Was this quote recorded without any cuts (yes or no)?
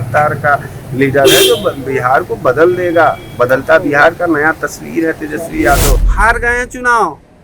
no